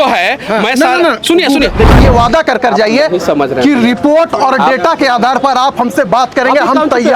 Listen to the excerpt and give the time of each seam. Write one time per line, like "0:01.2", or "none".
0:01.9